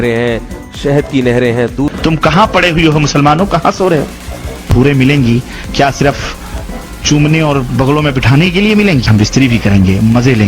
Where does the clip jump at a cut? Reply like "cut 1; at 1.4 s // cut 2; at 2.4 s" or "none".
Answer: cut 1; at 1.9 s // cut 2; at 4.7 s // cut 3; at 9.1 s